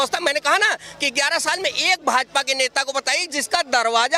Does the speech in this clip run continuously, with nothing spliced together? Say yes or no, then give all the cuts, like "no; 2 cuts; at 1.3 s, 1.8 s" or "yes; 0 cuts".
yes; 0 cuts